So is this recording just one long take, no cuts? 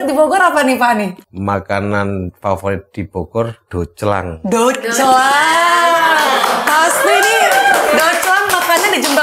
no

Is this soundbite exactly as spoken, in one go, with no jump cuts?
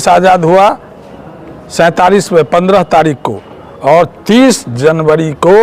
yes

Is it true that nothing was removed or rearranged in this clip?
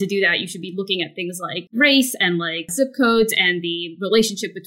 no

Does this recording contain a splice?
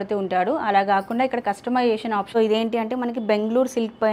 yes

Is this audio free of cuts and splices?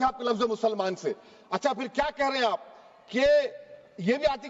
yes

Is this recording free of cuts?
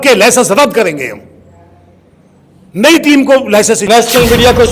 no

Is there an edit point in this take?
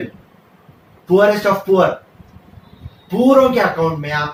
no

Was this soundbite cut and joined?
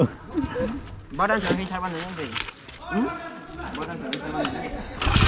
no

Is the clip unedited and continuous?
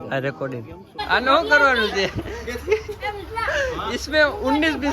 no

